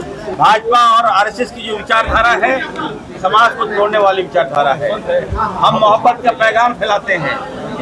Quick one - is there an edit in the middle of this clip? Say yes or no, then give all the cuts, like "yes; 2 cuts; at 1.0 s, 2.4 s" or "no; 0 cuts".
no; 0 cuts